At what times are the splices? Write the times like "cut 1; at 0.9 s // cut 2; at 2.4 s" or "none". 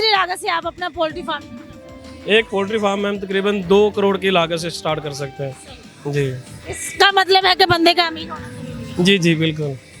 none